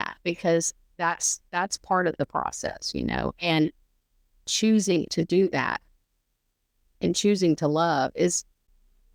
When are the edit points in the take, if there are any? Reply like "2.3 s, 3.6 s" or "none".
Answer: none